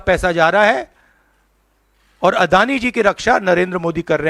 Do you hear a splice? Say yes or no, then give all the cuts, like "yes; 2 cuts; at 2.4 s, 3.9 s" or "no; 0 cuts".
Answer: no; 0 cuts